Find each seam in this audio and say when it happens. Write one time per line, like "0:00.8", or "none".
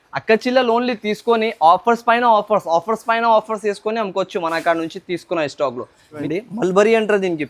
0:06.1

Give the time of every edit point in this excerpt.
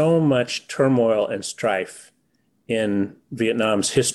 none

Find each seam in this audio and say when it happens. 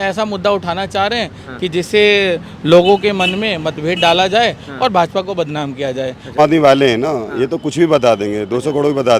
0:06.4

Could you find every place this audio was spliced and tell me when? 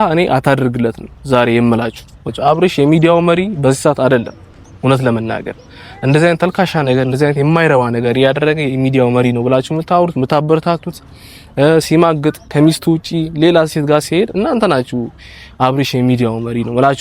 0:01.1
0:02.2

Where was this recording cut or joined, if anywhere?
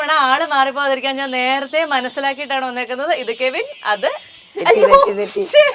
none

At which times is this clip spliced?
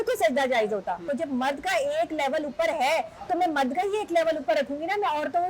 0:01.0

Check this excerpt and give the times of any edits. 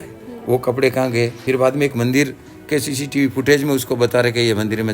0:01.4

